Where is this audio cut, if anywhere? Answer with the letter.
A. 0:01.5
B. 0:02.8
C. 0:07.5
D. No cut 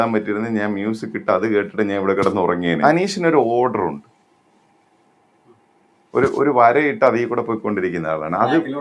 B